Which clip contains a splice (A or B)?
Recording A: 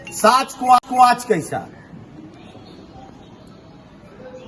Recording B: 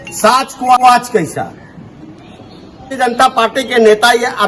B